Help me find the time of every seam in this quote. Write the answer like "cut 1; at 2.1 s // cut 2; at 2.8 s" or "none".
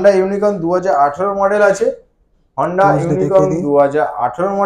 none